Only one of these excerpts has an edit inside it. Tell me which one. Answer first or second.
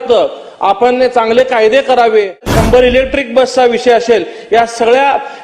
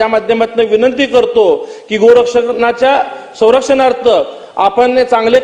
first